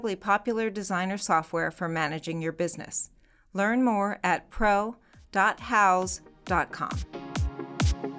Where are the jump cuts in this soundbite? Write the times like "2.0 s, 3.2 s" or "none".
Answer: 6.8 s